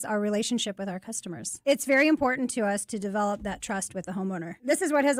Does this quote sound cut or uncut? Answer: uncut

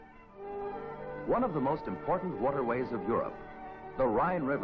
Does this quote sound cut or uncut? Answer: cut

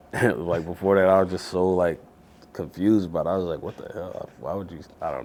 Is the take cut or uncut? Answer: uncut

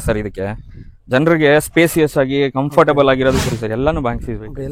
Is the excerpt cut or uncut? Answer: cut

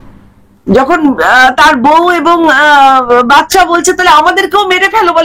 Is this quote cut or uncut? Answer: uncut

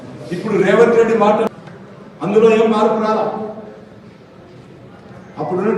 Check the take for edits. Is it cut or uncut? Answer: cut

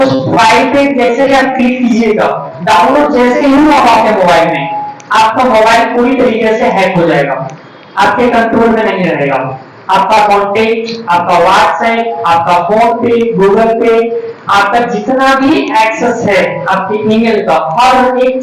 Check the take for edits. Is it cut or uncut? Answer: uncut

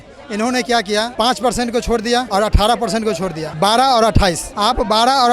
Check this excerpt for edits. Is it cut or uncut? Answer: cut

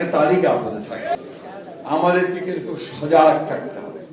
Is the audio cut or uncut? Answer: cut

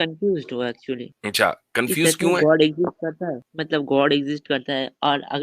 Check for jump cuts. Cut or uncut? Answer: cut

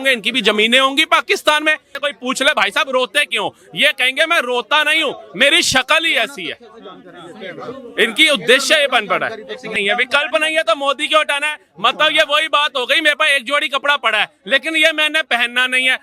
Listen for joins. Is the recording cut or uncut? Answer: cut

